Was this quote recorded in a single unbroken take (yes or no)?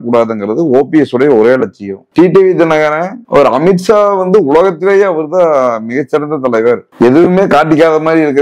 no